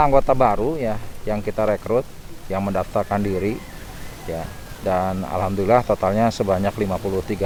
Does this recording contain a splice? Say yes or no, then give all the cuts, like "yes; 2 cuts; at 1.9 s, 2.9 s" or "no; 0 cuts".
no; 0 cuts